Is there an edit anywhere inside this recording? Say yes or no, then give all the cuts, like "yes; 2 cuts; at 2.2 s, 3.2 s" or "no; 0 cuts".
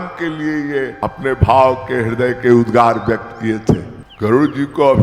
yes; 2 cuts; at 1.0 s, 3.9 s